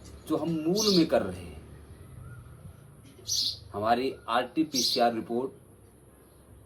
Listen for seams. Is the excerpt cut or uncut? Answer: uncut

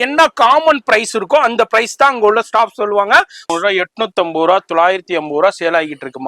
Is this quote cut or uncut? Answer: cut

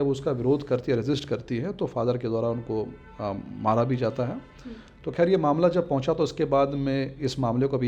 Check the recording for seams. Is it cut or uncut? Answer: uncut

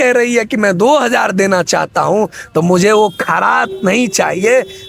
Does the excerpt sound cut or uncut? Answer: uncut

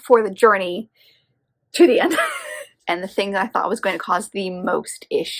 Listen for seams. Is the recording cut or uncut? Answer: cut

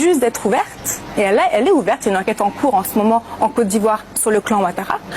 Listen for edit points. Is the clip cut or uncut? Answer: cut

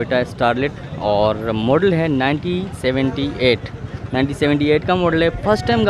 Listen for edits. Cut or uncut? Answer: uncut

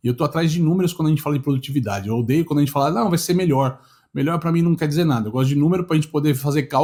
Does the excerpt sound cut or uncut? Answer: uncut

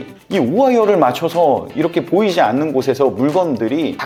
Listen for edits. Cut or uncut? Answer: uncut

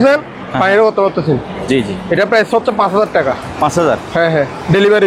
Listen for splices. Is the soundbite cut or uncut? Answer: uncut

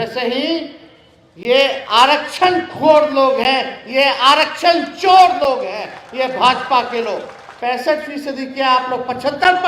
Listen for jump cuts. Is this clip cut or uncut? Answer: cut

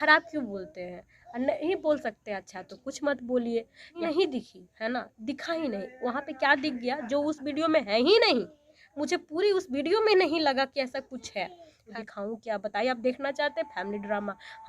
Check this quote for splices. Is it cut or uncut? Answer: cut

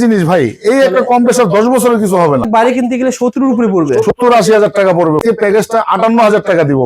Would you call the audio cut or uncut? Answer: cut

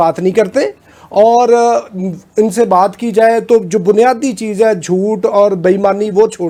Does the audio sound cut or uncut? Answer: uncut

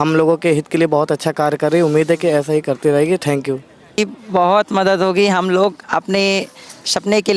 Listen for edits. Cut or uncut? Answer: cut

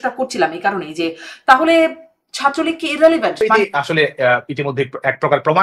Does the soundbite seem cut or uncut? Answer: cut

